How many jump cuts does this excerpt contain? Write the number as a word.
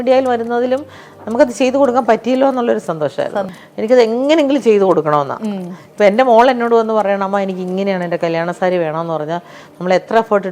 one